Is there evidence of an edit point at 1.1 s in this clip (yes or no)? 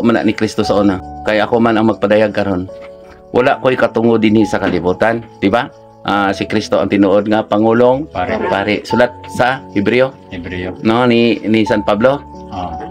yes